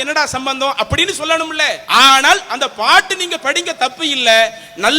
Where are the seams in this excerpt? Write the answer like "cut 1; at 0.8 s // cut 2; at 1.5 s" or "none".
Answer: cut 1; at 1.8 s